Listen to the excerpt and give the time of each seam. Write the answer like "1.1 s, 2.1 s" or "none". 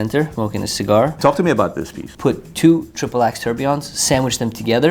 0.9 s, 2.1 s